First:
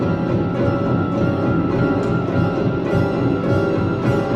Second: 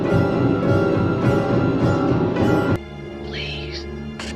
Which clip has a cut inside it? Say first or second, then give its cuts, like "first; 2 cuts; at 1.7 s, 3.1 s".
second; 1 cut; at 2.8 s